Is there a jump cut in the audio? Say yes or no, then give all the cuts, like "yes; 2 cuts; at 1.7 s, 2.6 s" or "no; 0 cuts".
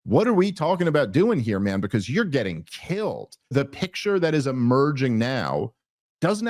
yes; 1 cut; at 3.5 s